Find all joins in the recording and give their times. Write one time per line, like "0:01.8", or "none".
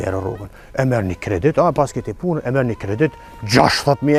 none